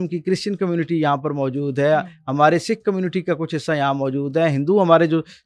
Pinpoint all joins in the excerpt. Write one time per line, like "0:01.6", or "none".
none